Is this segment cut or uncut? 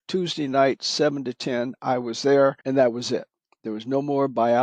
cut